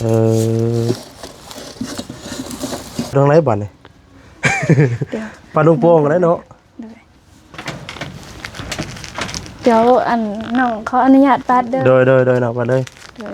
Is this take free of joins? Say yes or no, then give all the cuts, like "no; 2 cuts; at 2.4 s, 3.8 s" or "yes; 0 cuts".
no; 1 cut; at 3.1 s